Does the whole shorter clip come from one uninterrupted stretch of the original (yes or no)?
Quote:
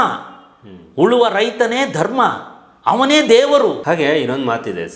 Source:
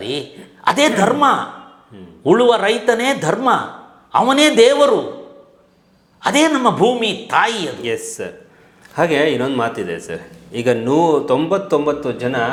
no